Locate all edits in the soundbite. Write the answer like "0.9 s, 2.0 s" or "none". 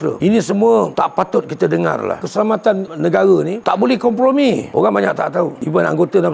4.7 s